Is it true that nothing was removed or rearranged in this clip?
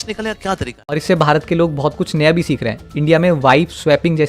no; 1 cut; at 1.0 s

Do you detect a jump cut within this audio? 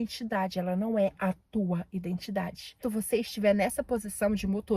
yes; 1 cut; at 2.8 s

